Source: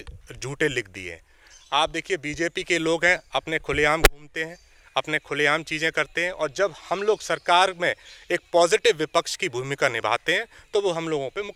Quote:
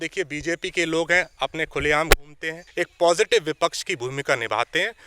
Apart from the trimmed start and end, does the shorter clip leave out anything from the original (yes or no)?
yes